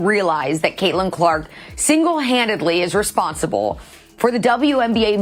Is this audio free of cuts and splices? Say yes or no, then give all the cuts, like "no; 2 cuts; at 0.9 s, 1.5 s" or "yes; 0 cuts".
yes; 0 cuts